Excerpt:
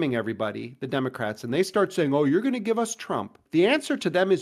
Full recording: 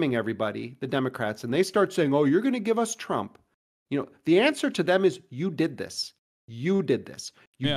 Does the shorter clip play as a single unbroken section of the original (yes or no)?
no